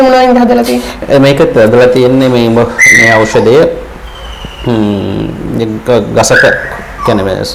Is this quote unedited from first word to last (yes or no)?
yes